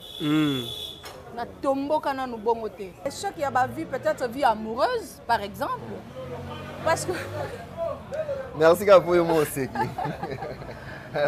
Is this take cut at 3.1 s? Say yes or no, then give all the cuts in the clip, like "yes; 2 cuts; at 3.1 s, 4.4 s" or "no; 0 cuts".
yes; 1 cut; at 3.1 s